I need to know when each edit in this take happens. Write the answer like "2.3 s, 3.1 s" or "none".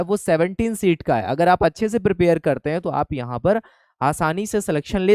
none